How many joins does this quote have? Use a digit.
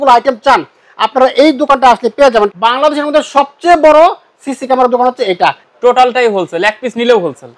2